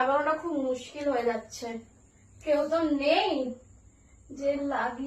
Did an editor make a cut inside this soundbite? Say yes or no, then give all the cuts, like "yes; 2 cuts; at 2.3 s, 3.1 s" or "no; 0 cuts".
no; 0 cuts